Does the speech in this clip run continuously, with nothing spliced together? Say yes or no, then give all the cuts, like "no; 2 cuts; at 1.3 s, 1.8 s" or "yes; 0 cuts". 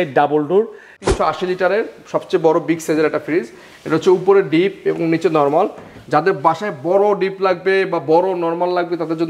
no; 1 cut; at 1.0 s